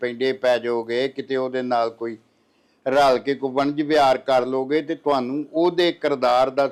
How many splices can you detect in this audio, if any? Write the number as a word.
zero